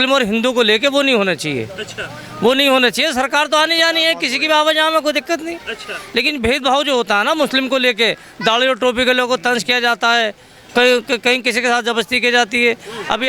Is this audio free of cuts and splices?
yes; 0 cuts

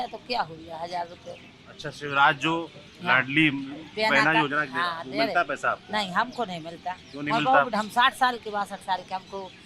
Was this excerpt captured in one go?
yes; 0 cuts

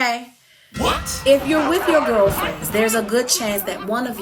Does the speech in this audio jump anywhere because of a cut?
no; 0 cuts

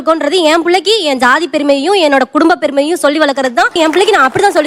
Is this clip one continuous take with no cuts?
yes; 0 cuts

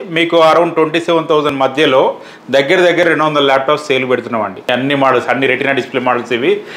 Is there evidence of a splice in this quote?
yes; 1 cut; at 4.6 s

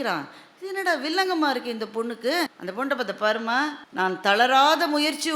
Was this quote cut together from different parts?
yes; 2 cuts; at 2.6 s, 3.8 s

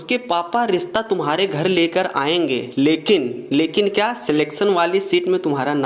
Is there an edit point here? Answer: no; 0 cuts

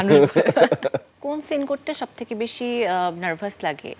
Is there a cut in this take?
yes; 1 cut; at 1.1 s

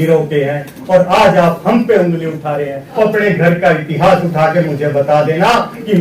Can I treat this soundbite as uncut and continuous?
no; 1 cut; at 3.0 s

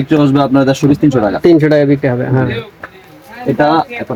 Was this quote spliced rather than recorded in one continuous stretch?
no; 0 cuts

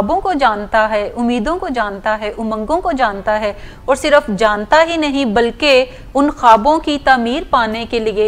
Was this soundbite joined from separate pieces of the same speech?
no; 0 cuts

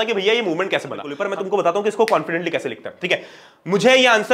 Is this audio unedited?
no; 1 cut; at 1.1 s

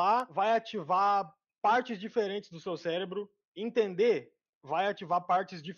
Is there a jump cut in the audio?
no; 0 cuts

